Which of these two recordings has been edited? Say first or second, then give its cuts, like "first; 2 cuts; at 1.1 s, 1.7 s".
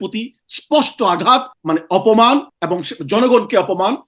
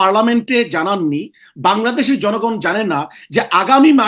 first; 2 cuts; at 1.5 s, 2.6 s